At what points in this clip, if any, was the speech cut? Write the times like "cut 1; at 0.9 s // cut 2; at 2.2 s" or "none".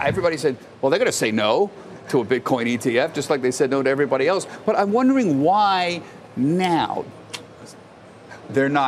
cut 1; at 7.1 s

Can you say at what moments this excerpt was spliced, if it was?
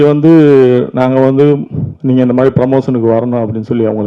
none

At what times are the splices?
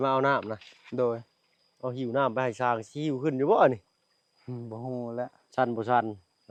none

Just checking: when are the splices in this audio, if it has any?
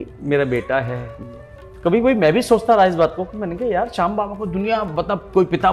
none

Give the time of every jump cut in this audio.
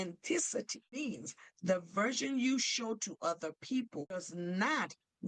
cut 1; at 1.0 s // cut 2; at 4.2 s

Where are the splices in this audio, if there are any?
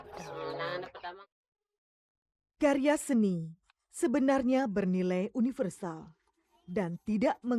cut 1; at 1.1 s

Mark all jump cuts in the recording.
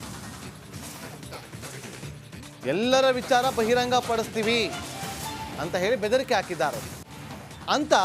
none

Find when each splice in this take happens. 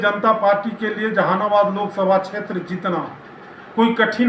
none

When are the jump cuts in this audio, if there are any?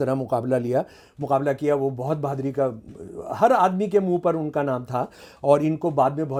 none

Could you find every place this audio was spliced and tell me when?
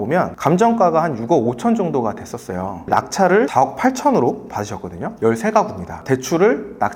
cut 1; at 3.5 s // cut 2; at 5.2 s

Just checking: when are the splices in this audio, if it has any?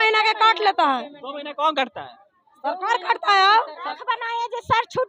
cut 1; at 3.9 s

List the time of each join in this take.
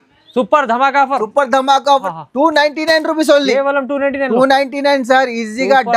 cut 1; at 2.1 s

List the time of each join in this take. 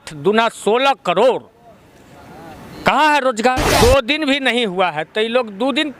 cut 1; at 3.7 s

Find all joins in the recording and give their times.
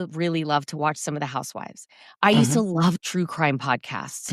none

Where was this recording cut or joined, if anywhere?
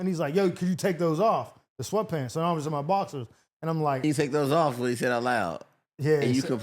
cut 1; at 4.0 s

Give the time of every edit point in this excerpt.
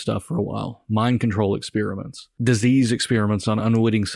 cut 1; at 2.2 s

